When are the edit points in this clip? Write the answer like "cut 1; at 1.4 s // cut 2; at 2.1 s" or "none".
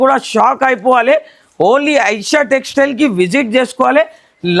none